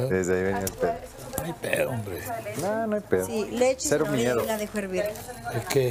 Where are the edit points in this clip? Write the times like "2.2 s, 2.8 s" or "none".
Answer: none